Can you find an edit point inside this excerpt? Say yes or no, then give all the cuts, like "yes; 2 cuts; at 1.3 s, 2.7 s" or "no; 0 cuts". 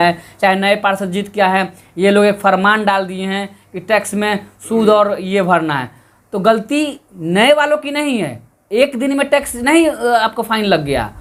no; 0 cuts